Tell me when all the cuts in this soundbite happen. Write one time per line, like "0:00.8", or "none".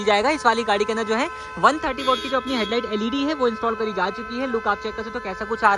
none

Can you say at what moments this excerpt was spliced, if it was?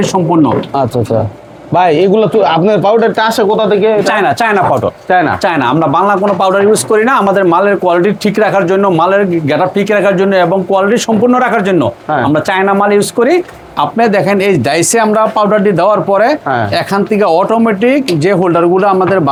none

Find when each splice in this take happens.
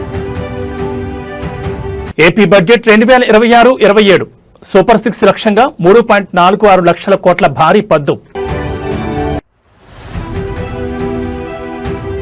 0:01.0

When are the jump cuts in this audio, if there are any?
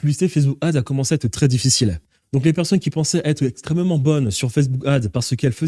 none

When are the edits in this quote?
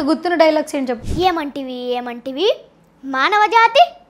0:01.1

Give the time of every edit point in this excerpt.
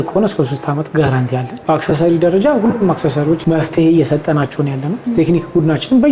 0:01.5
0:03.4
0:04.9

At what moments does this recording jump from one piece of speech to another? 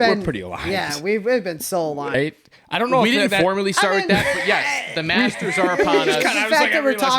0:02.1

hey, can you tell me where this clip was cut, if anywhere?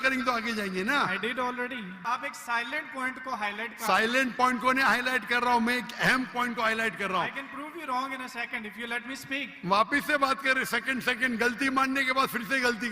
0:02.0

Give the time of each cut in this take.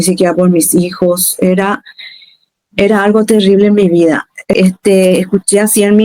0:04.5

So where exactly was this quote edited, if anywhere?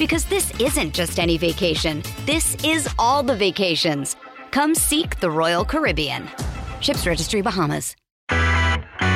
0:08.2

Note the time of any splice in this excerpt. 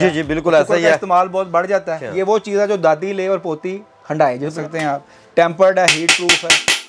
0:02.0
0:04.5

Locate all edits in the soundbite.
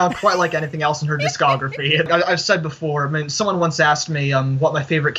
0:02.1

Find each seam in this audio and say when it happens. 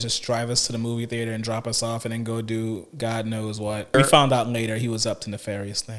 0:03.9

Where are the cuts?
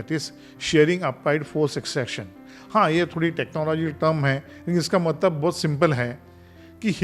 none

